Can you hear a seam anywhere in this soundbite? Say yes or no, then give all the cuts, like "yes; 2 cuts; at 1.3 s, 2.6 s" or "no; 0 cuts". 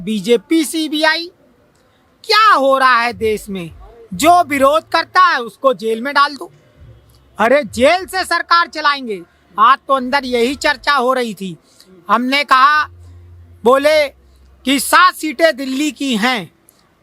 no; 0 cuts